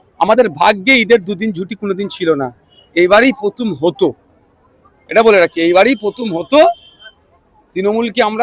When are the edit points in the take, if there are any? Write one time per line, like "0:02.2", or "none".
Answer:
none